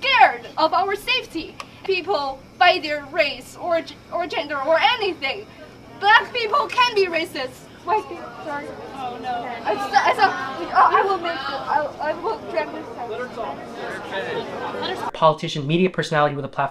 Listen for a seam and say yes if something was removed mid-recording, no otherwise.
yes